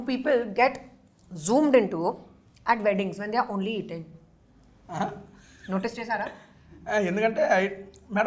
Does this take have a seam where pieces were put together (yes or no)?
no